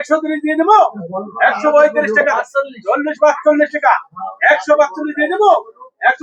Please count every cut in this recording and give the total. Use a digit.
0